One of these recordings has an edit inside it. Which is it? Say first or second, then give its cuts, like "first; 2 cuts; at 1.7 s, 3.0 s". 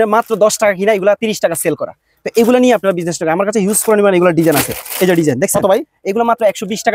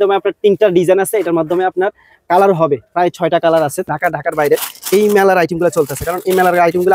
second; 1 cut; at 3.9 s